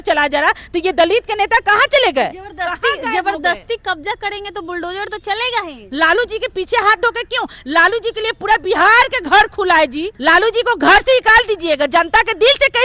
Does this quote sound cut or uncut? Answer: cut